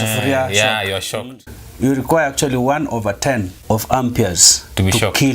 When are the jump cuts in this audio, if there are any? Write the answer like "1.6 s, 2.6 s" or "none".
1.4 s, 3.5 s